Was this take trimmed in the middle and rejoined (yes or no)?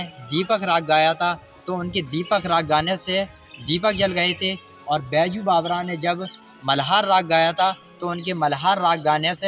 no